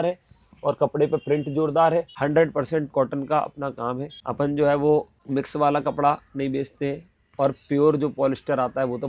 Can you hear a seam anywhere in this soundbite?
yes; 3 cuts; at 2.1 s, 4.2 s, 5.2 s

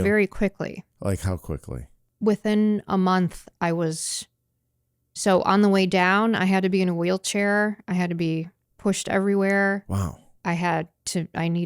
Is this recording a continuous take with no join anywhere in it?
no; 1 cut; at 2.0 s

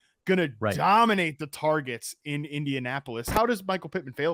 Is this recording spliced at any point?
yes; 1 cut; at 3.3 s

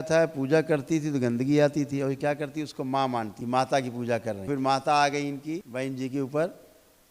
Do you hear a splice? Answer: yes; 3 cuts; at 3.4 s, 4.5 s, 5.7 s

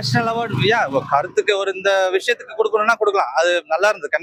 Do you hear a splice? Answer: no; 0 cuts

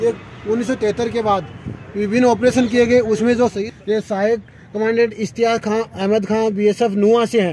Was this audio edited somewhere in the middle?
yes; 1 cut; at 3.6 s

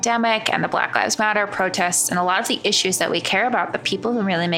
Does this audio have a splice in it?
no; 0 cuts

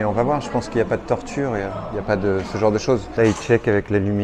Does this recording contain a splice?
yes; 1 cut; at 3.1 s

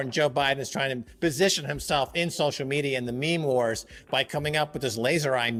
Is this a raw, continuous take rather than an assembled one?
yes; 0 cuts

